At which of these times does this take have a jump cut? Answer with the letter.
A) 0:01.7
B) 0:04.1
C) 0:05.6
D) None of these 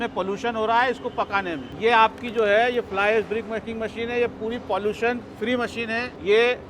A